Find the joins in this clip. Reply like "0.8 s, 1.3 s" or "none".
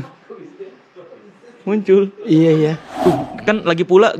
2.9 s